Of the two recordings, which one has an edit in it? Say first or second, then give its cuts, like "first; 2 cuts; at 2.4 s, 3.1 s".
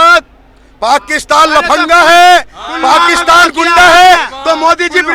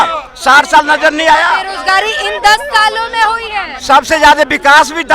second; 1 cut; at 1.7 s